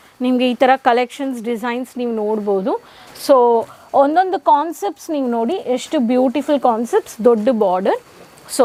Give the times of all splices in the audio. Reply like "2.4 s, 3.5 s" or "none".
none

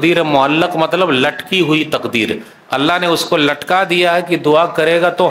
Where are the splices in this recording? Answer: none

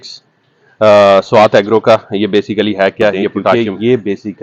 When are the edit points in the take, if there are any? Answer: 3.5 s

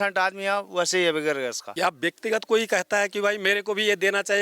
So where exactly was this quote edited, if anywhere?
1.6 s

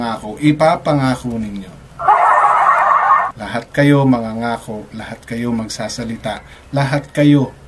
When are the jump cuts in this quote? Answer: 3.2 s

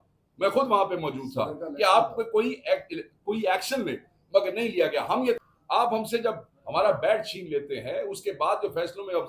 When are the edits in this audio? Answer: 5.4 s

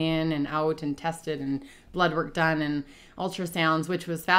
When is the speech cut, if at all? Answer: none

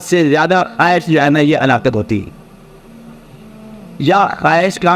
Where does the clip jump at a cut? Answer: none

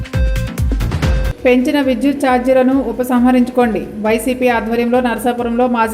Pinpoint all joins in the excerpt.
1.0 s

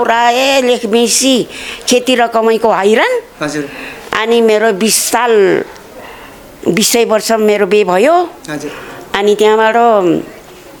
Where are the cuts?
none

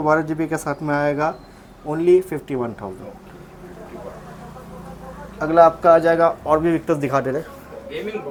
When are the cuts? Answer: none

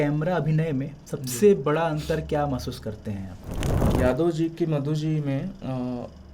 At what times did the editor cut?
3.9 s

